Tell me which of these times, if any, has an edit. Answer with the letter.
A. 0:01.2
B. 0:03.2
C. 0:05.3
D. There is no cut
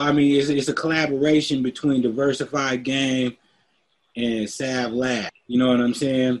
C